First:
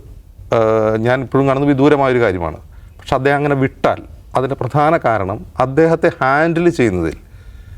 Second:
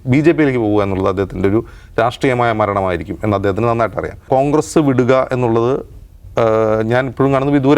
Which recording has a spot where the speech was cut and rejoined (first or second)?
second